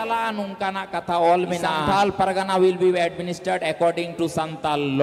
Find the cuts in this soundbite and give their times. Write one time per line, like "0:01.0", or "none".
0:01.8

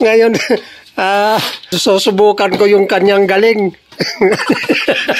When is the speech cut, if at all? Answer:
0:01.8

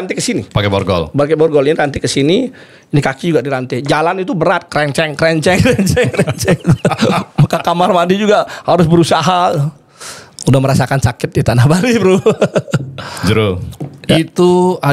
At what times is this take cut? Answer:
none

